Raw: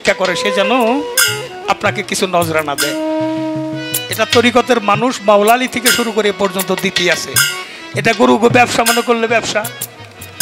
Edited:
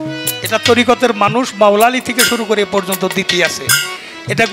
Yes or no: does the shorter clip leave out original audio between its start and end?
no